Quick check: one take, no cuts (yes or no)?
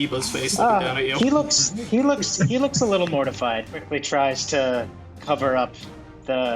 yes